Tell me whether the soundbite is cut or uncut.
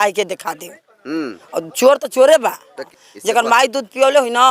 cut